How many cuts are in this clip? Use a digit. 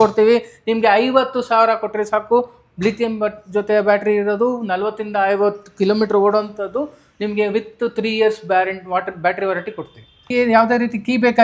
1